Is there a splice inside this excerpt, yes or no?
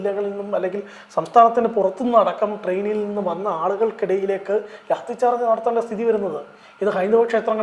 no